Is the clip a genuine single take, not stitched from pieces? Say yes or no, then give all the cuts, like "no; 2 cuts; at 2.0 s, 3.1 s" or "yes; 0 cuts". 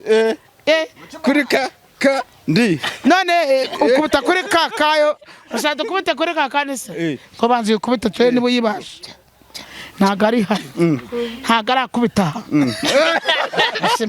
yes; 0 cuts